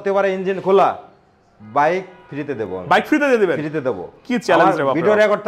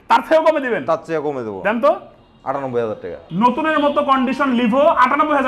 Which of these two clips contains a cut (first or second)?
second